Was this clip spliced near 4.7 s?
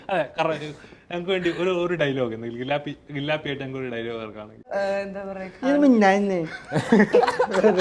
yes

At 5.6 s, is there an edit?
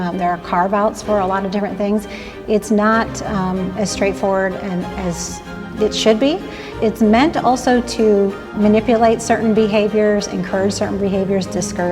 yes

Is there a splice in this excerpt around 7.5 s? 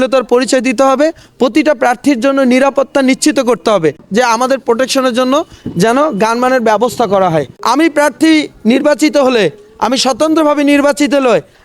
yes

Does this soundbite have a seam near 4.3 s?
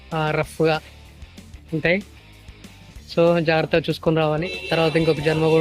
yes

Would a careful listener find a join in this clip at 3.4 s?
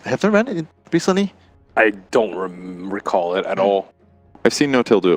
no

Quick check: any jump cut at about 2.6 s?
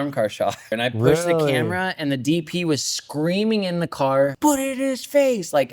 no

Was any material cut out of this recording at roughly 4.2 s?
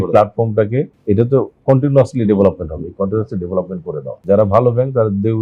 yes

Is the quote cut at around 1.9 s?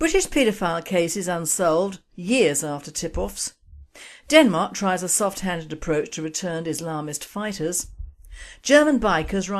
no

